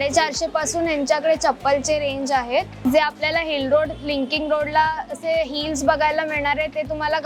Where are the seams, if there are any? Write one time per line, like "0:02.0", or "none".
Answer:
0:02.8